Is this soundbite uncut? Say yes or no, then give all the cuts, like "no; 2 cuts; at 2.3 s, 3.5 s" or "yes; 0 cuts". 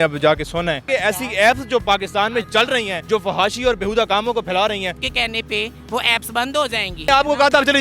no; 3 cuts; at 0.9 s, 5.0 s, 7.1 s